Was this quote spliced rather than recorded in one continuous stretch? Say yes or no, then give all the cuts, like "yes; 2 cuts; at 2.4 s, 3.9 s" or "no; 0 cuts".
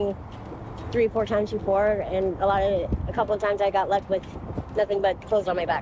no; 0 cuts